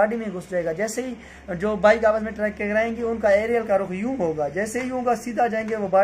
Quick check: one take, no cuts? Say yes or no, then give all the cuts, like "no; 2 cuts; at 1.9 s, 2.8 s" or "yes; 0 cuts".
yes; 0 cuts